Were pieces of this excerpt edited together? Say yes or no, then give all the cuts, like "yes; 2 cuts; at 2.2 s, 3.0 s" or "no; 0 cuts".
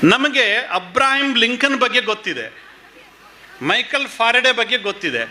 no; 0 cuts